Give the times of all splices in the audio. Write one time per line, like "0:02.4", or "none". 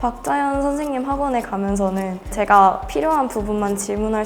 0:02.3